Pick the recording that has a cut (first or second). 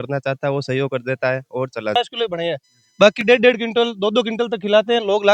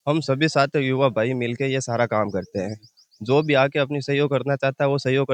first